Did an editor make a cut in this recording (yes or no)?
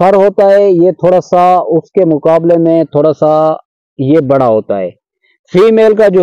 no